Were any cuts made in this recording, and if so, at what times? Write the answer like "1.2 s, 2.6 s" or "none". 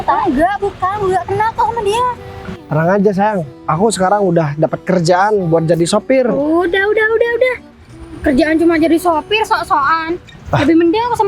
2.6 s